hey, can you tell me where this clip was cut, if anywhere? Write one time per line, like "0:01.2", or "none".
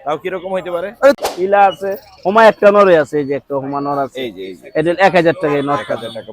0:01.2